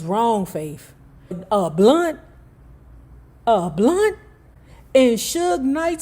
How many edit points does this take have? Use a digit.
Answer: 1